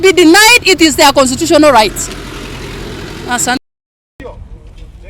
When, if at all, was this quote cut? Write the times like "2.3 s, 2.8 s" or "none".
none